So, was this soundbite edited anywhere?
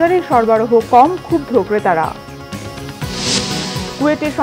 no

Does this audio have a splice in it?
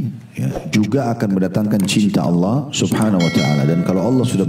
no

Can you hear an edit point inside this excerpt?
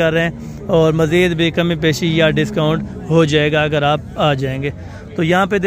no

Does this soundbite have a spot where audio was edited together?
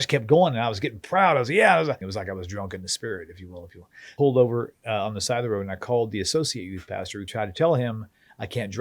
yes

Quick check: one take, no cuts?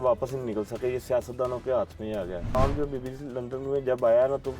no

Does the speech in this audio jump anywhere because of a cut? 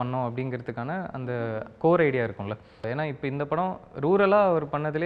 yes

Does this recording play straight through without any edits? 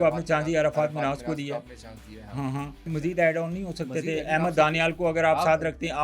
no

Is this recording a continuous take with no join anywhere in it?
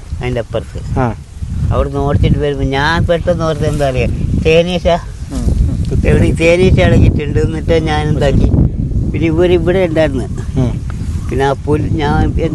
yes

